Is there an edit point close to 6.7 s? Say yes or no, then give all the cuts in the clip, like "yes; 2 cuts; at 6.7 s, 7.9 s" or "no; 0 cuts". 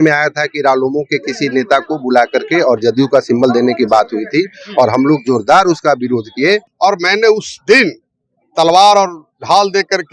yes; 1 cut; at 6.7 s